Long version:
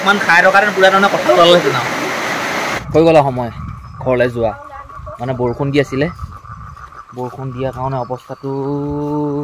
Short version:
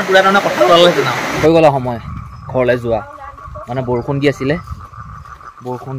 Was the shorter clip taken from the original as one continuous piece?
no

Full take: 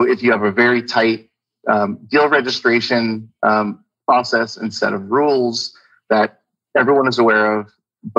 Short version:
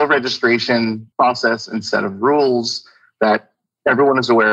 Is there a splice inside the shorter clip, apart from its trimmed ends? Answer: yes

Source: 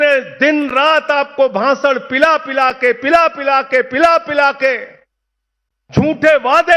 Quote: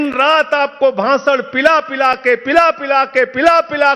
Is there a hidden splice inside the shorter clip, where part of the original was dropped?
no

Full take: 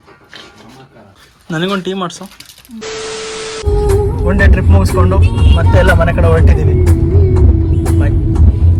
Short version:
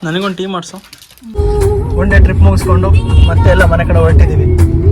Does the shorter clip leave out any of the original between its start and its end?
yes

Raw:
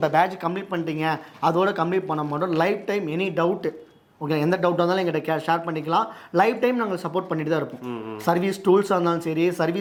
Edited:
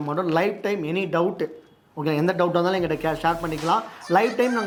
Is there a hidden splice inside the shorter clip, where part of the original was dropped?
no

